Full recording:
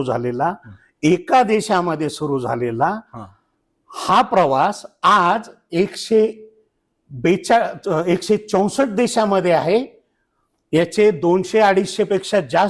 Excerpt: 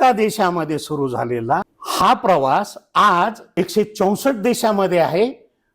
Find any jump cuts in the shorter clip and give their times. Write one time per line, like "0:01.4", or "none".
0:01.8
0:03.5